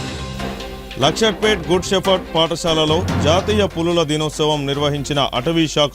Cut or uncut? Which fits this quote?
cut